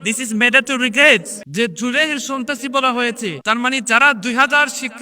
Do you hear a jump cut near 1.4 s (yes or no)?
yes